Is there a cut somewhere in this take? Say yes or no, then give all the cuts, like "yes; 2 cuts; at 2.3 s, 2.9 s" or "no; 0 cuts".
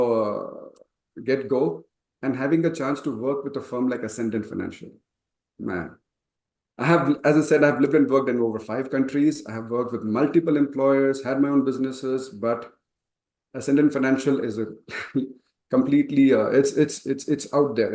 no; 0 cuts